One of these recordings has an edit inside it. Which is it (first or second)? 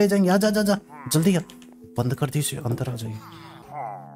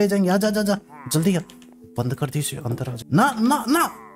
second